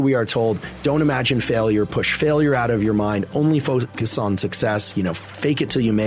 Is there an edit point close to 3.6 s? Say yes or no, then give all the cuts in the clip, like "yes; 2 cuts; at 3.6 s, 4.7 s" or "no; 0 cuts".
no; 0 cuts